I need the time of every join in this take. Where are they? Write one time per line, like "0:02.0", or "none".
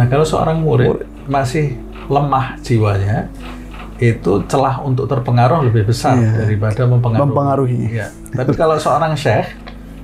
none